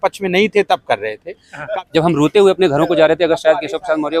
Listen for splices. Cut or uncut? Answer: cut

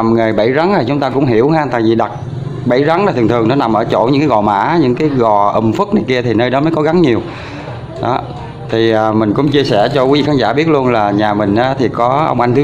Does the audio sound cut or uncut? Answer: uncut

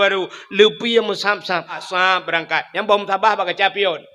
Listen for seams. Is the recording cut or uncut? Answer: cut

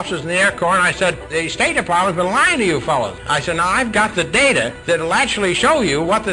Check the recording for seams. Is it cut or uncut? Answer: cut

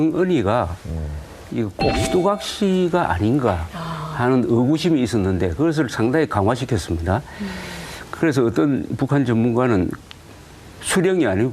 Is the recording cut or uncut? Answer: cut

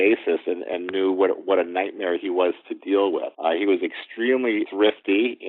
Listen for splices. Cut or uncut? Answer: cut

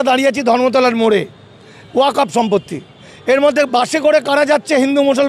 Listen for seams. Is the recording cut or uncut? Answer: uncut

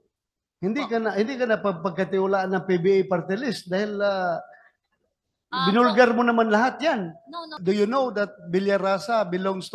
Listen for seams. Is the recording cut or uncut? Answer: cut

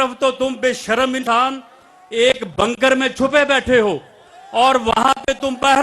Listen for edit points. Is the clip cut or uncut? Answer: cut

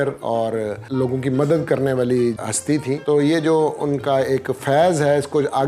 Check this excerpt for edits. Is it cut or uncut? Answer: cut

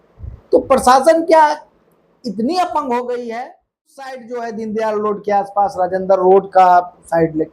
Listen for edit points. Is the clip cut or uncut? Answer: cut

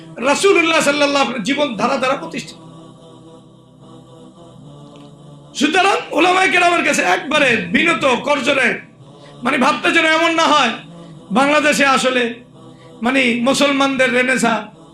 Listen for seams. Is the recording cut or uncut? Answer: cut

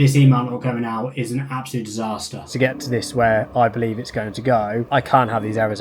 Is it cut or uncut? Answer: cut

